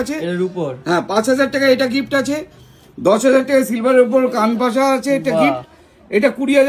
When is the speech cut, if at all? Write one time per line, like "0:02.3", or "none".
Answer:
none